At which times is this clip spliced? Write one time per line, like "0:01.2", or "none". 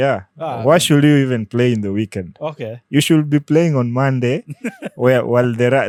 none